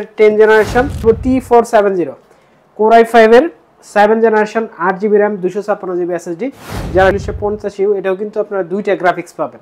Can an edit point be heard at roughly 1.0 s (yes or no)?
yes